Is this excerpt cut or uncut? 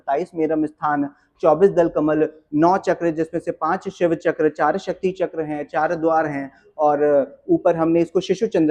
uncut